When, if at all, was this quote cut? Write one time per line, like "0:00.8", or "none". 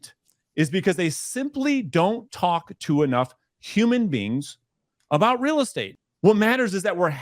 0:05.8